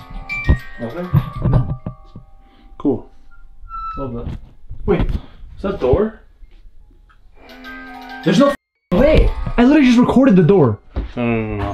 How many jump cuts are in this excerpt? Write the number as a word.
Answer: zero